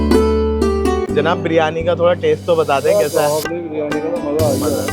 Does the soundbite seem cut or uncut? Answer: cut